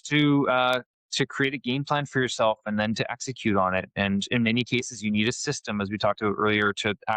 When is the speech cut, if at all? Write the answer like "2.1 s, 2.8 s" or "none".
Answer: none